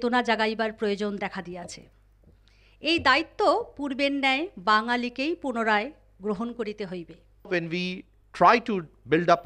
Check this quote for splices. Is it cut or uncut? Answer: cut